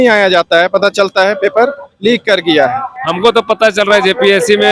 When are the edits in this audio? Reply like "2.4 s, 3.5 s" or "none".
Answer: 3.1 s